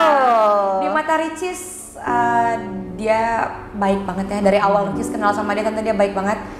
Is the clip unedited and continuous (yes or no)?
yes